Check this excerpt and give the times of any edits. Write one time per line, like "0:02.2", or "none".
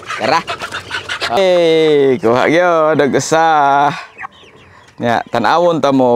0:01.4